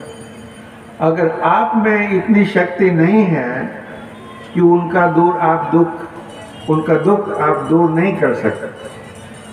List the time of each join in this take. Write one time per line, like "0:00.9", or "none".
none